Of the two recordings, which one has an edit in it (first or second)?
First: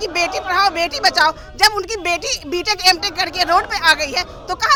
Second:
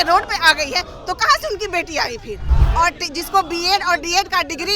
second